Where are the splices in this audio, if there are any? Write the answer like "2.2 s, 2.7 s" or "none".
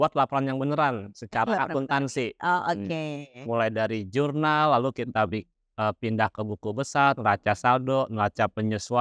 none